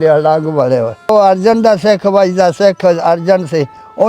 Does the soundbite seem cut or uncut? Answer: cut